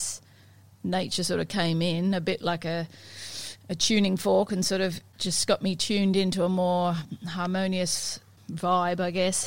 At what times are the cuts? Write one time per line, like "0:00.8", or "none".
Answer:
0:05.1
0:08.4